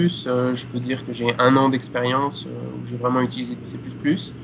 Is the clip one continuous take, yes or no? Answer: yes